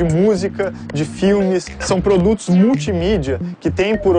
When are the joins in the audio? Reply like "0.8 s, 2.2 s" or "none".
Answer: none